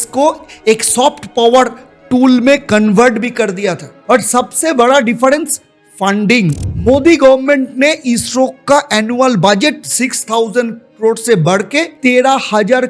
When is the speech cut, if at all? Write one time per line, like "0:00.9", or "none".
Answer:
none